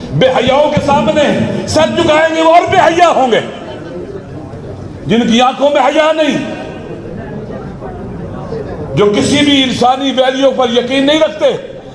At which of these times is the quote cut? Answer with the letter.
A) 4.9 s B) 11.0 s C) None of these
C